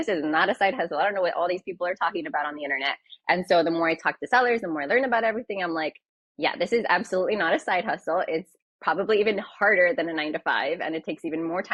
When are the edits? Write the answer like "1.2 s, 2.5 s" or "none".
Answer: none